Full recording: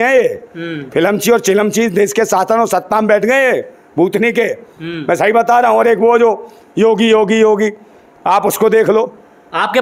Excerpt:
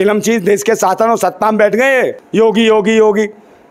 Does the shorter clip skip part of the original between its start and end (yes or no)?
yes